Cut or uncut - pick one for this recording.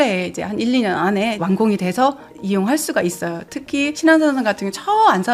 cut